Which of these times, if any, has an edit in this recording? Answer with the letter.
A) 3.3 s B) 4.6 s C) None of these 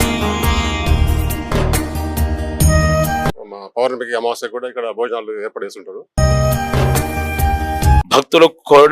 A